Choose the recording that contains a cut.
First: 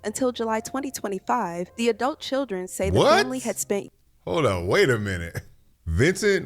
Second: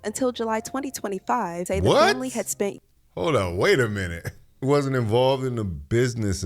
second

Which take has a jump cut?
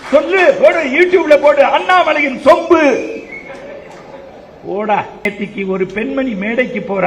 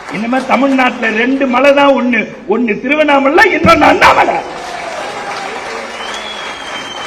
first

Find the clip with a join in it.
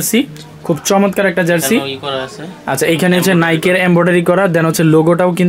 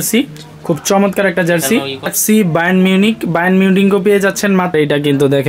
second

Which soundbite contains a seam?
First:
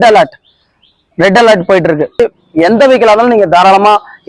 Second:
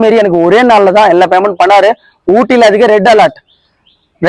first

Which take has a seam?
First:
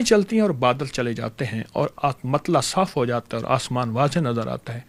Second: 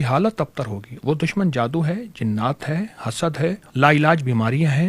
second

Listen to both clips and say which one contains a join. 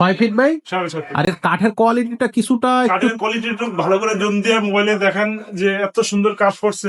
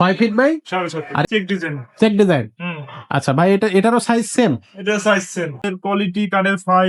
second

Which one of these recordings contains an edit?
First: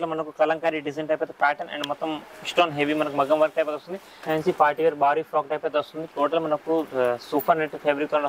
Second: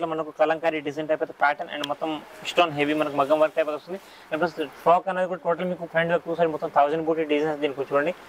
first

